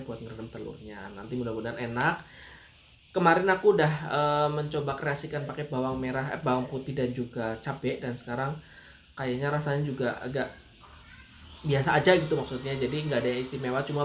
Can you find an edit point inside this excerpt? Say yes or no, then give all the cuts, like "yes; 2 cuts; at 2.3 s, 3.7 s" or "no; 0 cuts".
no; 0 cuts